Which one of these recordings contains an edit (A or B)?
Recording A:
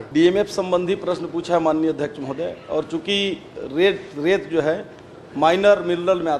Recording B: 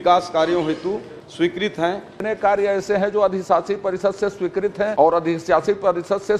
B